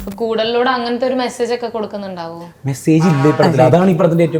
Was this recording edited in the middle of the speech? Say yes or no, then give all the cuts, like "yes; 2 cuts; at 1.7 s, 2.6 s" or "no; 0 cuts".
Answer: no; 0 cuts